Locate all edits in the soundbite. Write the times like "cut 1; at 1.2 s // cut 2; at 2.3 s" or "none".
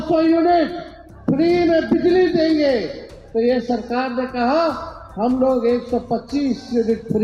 none